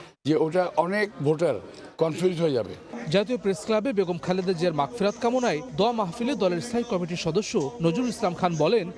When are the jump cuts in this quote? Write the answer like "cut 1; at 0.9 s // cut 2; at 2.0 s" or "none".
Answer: none